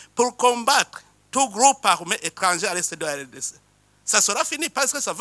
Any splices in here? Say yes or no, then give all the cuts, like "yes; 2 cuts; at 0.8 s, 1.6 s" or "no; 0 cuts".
no; 0 cuts